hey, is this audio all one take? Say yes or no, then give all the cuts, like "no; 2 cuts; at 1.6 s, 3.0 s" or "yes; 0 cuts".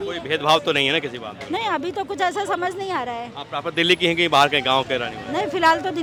yes; 0 cuts